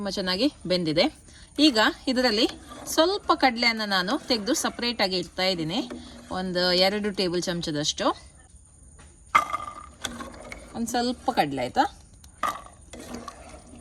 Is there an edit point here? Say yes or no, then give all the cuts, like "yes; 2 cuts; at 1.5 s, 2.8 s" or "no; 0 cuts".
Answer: no; 0 cuts